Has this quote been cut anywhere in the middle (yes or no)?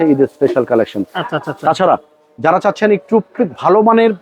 no